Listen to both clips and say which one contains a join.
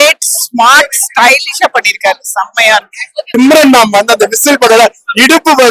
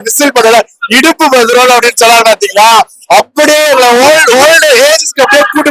first; 1 cut; at 3.3 s

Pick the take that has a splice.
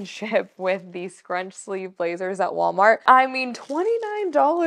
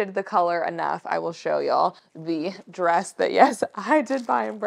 first; 1 cut; at 3.1 s

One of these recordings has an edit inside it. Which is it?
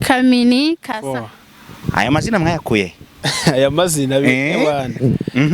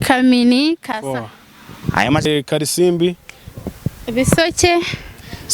second; 1 cut; at 2.3 s

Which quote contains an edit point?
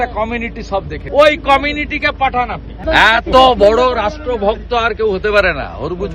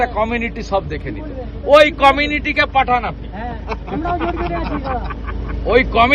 first; 2 cuts; at 1.0 s, 2.8 s

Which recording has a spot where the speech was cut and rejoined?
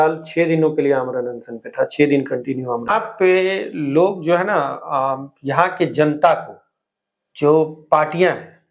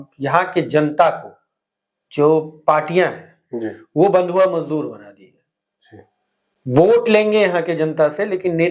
first; 1 cut; at 2.9 s

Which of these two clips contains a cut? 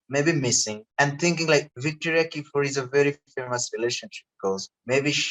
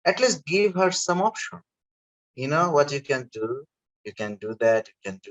first; 2 cuts; at 0.8 s, 1.7 s

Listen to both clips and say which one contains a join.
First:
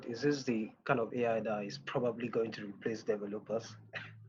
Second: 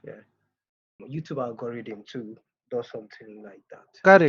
second; 1 cut; at 1.0 s

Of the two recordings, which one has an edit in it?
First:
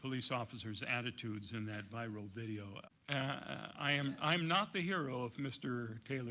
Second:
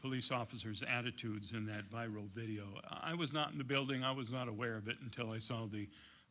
first; 1 cut; at 2.8 s

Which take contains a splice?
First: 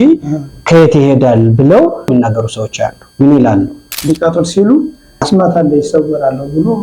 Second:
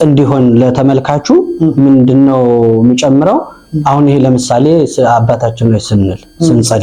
first; 2 cuts; at 2.1 s, 4.0 s

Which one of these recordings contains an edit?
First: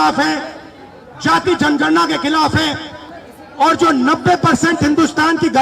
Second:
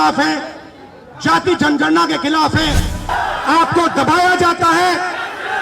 second; 1 cut; at 3.1 s

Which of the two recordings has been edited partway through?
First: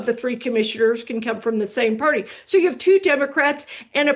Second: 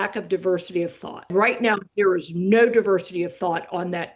second; 1 cut; at 1.3 s

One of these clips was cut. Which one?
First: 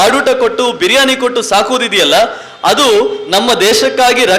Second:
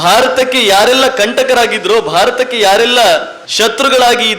second; 1 cut; at 3.4 s

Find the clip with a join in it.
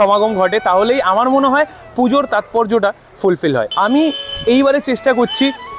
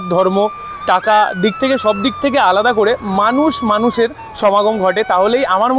first; 1 cut; at 3.7 s

